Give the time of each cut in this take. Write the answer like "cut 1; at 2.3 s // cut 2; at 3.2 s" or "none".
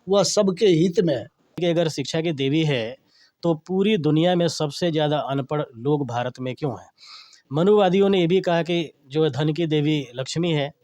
cut 1; at 1.6 s